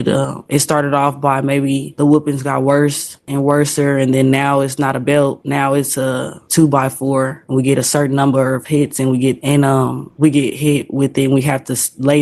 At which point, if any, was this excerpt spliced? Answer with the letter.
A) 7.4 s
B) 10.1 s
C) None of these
C